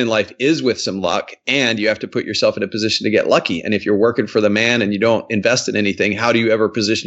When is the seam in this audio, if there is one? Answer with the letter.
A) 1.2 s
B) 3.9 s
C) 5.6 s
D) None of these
D